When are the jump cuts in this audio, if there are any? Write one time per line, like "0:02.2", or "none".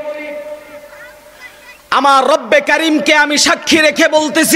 none